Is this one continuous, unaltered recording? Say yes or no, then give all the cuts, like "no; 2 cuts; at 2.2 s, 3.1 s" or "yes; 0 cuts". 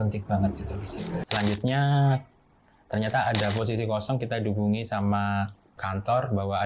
no; 1 cut; at 1.2 s